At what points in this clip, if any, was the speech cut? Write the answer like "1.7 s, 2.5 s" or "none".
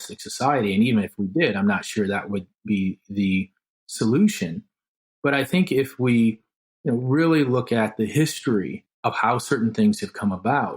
8.8 s